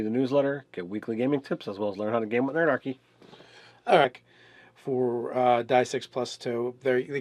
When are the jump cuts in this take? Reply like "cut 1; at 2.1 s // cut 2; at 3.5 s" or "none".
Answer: none